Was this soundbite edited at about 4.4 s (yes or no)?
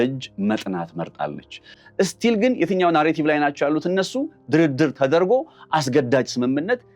no